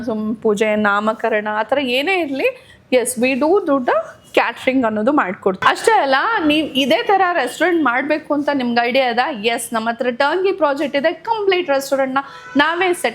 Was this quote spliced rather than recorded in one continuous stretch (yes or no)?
yes